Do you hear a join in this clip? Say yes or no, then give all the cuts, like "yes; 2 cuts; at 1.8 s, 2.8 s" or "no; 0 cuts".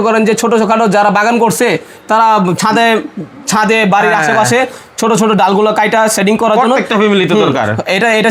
no; 0 cuts